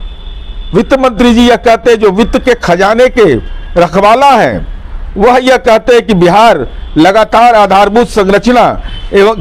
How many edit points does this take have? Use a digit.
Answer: 0